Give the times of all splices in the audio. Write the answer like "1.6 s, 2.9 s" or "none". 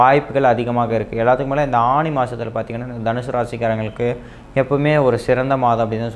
none